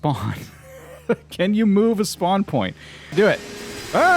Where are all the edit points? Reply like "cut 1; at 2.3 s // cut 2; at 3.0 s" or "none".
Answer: cut 1; at 3.1 s

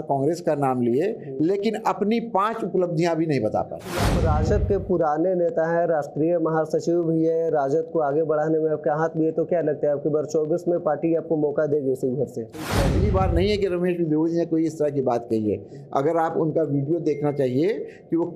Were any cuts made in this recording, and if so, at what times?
cut 1; at 4.1 s // cut 2; at 12.8 s

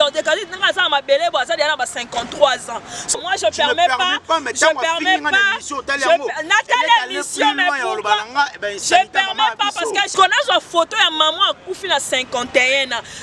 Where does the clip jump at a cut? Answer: cut 1; at 3.1 s // cut 2; at 10.1 s

